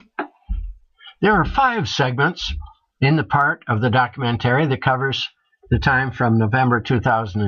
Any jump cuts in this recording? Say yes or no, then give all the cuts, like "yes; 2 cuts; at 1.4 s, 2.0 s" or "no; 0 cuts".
yes; 1 cut; at 1.9 s